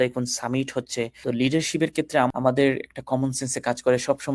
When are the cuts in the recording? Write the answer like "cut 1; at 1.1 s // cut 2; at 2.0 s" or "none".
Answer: cut 1; at 1.1 s // cut 2; at 2.3 s